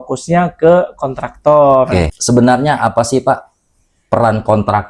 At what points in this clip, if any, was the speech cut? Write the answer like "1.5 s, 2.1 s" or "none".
2.1 s